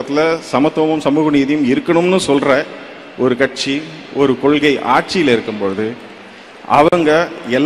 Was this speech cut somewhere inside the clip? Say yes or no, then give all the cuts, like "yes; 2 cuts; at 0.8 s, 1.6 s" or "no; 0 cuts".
no; 0 cuts